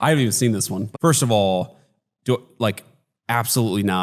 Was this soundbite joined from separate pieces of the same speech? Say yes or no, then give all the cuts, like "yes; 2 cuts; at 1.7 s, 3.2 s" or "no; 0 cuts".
yes; 1 cut; at 1.8 s